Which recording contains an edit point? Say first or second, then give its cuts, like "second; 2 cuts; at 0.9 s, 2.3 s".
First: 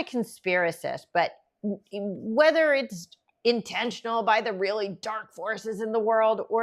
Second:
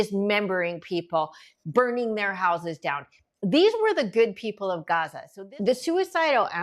second; 1 cut; at 5.2 s